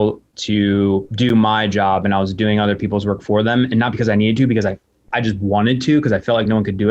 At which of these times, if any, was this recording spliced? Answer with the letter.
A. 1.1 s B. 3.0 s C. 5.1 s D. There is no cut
A